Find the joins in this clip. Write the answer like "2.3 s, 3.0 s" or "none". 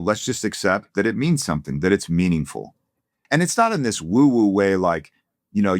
3.1 s

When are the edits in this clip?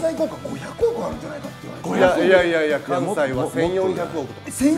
none

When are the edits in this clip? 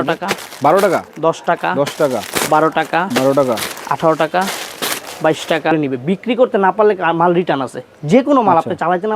5.7 s

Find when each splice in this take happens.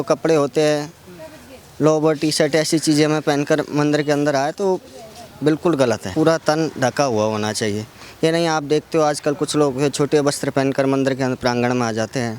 6.1 s

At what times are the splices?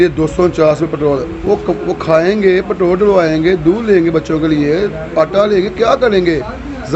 none

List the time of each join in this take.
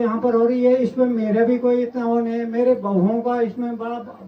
none

